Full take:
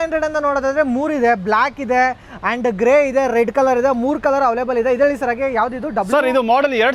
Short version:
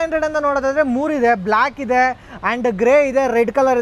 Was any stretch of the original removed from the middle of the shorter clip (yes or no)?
no